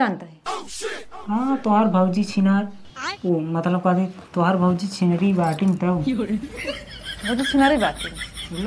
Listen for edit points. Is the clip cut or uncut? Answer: uncut